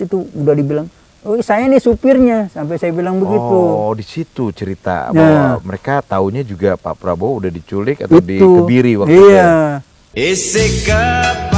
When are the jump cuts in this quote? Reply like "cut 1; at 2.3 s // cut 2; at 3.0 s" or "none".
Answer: cut 1; at 10.1 s